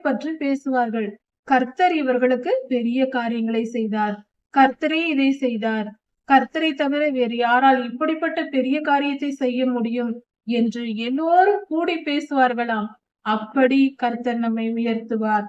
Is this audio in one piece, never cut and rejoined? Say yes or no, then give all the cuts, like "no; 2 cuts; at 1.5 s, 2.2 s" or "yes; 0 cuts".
yes; 0 cuts